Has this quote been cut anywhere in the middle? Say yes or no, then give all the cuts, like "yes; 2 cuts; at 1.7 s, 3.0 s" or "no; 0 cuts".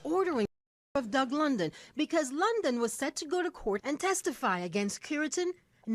no; 0 cuts